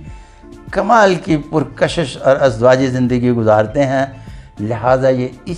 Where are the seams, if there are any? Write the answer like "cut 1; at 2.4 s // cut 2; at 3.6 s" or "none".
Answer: none